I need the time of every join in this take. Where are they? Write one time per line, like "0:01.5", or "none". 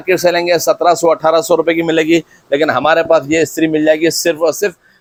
none